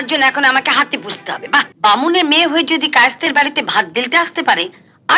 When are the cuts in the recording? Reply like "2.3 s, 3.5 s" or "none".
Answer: 1.7 s